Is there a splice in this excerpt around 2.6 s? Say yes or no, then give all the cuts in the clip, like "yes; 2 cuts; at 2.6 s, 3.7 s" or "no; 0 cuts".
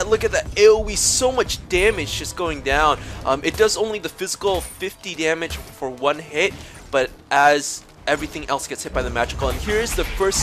no; 0 cuts